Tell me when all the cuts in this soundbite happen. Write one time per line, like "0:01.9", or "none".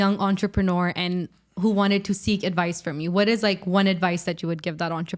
none